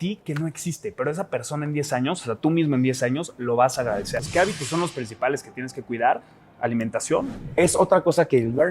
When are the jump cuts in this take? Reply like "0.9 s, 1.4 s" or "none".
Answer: 4.1 s, 7.4 s